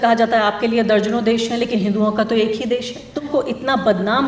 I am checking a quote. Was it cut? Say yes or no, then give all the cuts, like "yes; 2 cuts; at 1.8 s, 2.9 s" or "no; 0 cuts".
yes; 1 cut; at 3.3 s